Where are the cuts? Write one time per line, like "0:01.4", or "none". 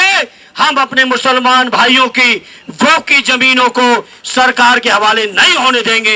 none

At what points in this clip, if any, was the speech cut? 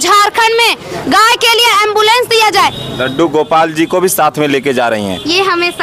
0:02.5

